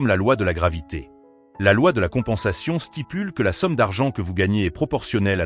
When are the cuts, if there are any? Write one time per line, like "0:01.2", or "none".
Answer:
0:01.2